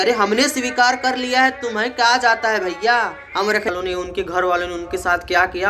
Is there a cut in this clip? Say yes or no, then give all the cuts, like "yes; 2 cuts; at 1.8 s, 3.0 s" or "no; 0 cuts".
yes; 1 cut; at 3.7 s